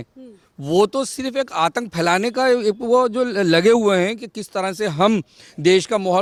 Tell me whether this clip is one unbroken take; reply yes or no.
yes